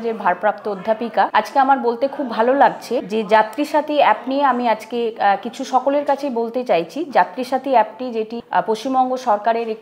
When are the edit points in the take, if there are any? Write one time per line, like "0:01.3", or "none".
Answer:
0:01.3
0:03.1
0:08.4